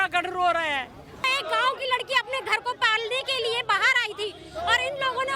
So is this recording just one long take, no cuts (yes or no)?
no